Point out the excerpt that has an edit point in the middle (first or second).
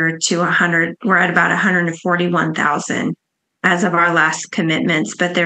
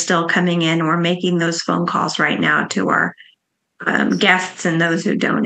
first